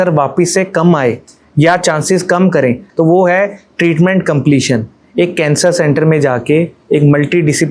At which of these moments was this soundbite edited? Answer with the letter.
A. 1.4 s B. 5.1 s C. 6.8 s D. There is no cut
D